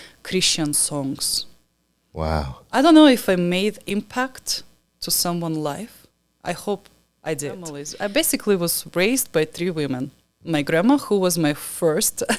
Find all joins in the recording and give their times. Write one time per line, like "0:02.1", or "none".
0:07.8

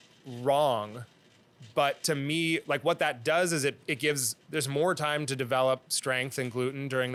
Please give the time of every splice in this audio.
none

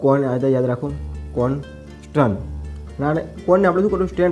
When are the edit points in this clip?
none

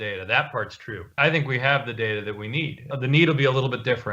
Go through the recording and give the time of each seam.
none

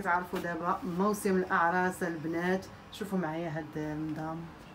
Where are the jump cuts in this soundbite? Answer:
none

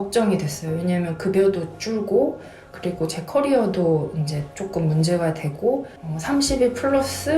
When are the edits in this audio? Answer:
0:06.0

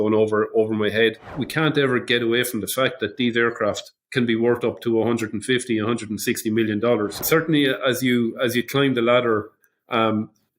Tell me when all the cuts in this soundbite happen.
0:01.4
0:07.2

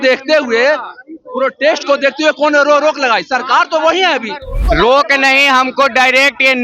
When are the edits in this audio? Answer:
0:04.5

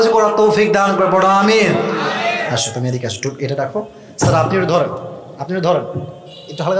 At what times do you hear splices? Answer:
0:02.4

